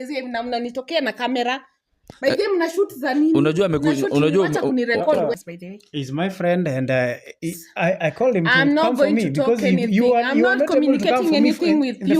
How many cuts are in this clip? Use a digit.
1